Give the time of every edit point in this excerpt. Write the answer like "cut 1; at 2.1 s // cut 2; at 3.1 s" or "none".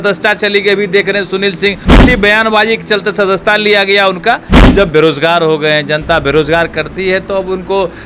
cut 1; at 2.0 s // cut 2; at 4.7 s